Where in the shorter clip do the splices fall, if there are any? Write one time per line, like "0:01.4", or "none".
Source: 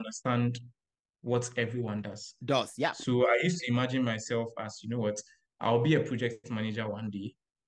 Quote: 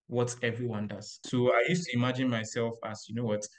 0:01.2